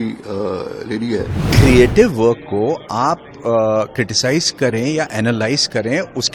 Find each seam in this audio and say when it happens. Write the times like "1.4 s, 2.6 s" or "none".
1.4 s

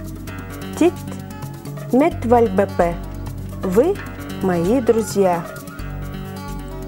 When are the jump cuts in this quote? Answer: 5.5 s

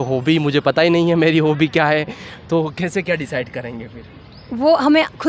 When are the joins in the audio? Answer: none

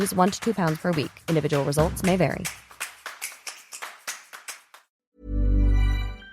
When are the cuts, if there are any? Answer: 4.9 s

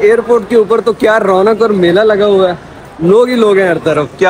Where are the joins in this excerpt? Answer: none

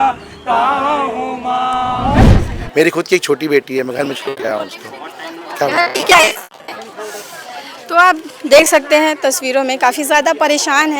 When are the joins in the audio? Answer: 2.2 s

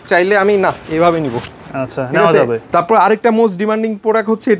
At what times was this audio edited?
2.6 s

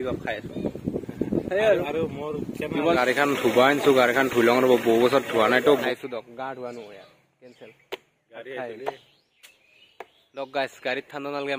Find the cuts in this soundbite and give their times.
3.0 s, 5.8 s

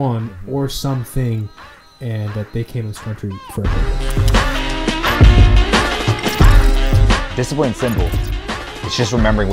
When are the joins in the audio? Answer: 3.9 s

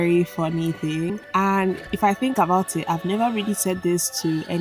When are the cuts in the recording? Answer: 1.9 s

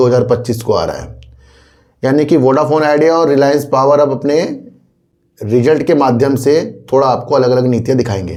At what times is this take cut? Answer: none

